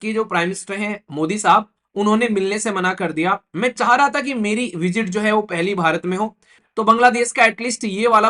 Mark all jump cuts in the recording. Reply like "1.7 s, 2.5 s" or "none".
6.6 s